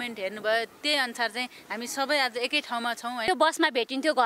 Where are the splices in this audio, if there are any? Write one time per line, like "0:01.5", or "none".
0:03.3